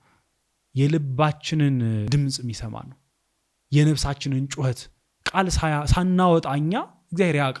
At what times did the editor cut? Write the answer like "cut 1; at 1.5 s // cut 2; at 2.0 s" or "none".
cut 1; at 2.1 s

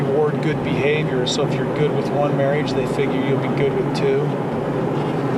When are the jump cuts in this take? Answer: none

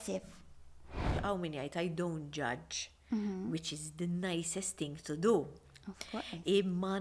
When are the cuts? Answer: cut 1; at 1.1 s

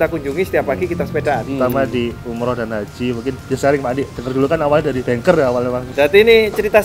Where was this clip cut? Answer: cut 1; at 1.4 s // cut 2; at 3.4 s // cut 3; at 5.0 s // cut 4; at 5.9 s

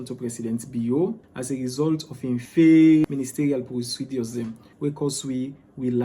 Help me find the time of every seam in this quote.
cut 1; at 1.3 s // cut 2; at 2.5 s // cut 3; at 3.0 s // cut 4; at 4.6 s

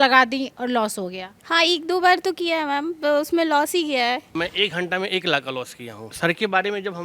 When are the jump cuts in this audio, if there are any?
cut 1; at 4.2 s // cut 2; at 6.1 s

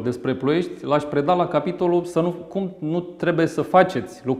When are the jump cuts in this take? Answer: none

